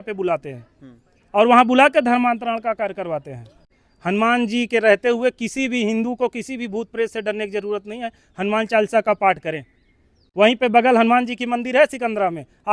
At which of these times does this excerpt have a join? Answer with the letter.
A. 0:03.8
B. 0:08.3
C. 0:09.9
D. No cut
A